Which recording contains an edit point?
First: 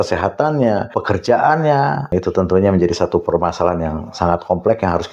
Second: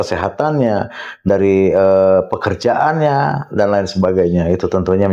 first; 2 cuts; at 1.0 s, 2.1 s

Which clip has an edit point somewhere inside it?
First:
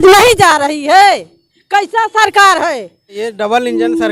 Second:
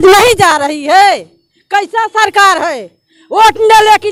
first; 1 cut; at 3.2 s

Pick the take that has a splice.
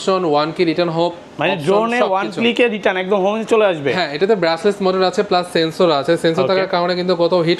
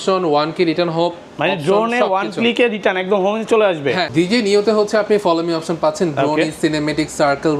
second; 1 cut; at 4.1 s

